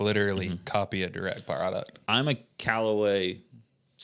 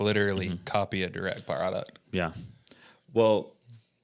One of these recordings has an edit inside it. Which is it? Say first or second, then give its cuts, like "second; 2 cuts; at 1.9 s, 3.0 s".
first; 1 cut; at 2.0 s